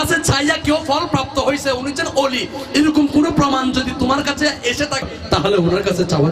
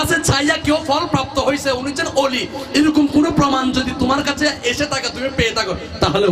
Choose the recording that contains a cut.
first; 1 cut; at 5.1 s

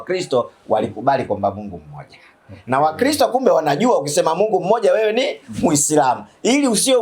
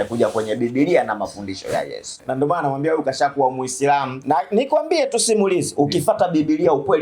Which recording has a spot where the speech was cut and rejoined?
second; 2 cuts; at 2.2 s, 4.1 s

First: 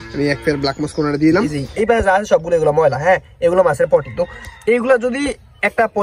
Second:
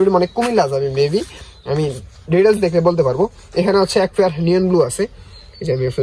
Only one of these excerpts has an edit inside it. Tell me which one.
first; 1 cut; at 1.6 s

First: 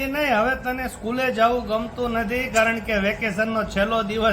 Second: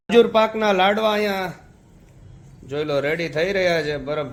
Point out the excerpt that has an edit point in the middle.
first; 1 cut; at 2.5 s

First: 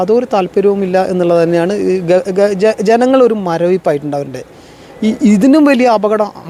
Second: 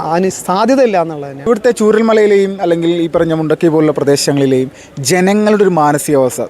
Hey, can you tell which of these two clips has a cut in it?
second; 1 cut; at 1.3 s

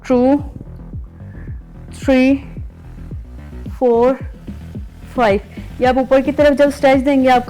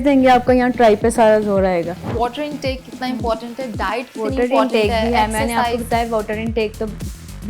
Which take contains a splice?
second; 1 cut; at 2.1 s

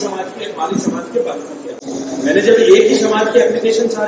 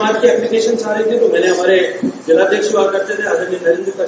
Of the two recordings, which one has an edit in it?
first; 1 cut; at 1.8 s

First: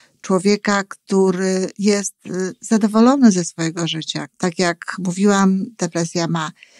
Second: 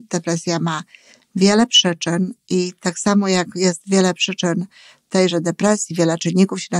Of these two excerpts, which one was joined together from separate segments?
first; 1 cut; at 4.2 s

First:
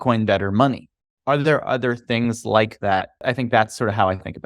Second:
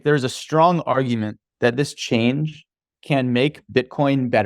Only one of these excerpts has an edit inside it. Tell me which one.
first; 2 cuts; at 1.0 s, 3.2 s

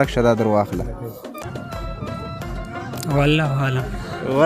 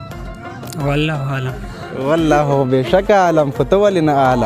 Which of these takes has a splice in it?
first; 1 cut; at 1.4 s

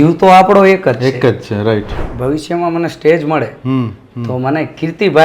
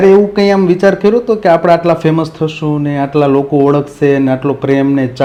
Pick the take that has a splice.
first; 1 cut; at 2.0 s

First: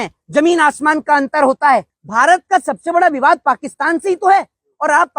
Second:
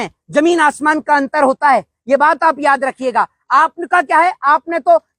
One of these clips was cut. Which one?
first; 1 cut; at 1.9 s

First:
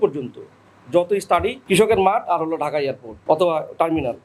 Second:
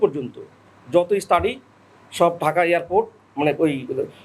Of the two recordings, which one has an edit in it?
first; 2 cuts; at 1.6 s, 3.1 s

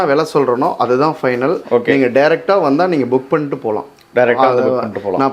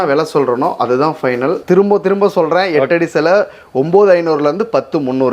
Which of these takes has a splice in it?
second; 1 cut; at 1.6 s

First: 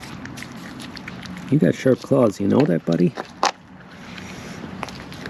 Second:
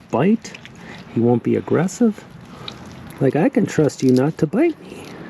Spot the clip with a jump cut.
second; 1 cut; at 3.0 s

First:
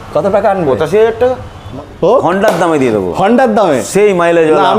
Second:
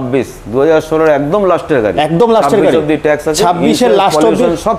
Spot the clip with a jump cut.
first; 1 cut; at 1.7 s

